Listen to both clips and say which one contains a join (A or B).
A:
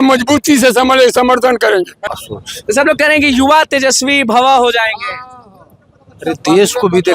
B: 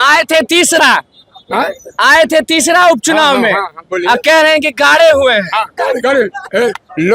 A